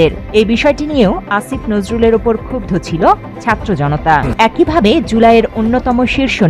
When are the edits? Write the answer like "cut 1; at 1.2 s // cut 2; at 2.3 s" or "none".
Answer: cut 1; at 4.3 s